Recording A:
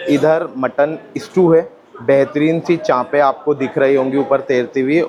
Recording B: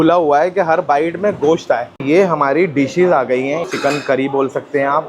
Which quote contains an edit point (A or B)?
B